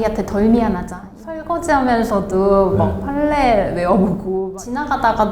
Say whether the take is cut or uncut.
cut